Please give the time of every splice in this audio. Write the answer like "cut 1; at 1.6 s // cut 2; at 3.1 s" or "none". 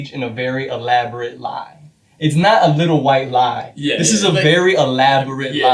none